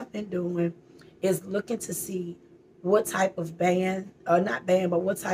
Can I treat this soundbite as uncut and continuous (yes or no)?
yes